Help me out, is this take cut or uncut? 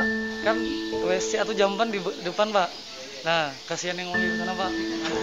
uncut